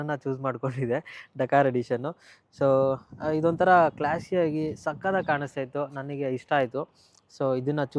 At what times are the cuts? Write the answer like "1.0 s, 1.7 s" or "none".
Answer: none